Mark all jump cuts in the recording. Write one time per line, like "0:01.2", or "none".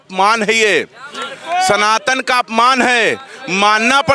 none